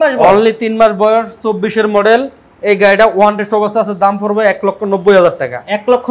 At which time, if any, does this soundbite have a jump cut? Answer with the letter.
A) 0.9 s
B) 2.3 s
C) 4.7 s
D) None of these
D